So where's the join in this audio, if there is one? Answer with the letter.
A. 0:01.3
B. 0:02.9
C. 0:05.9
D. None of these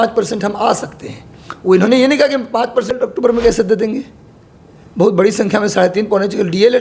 B